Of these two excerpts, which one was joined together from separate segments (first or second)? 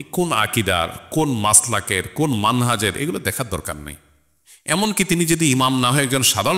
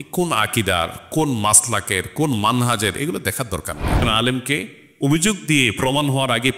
second